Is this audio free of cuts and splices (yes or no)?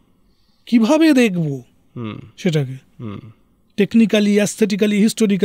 yes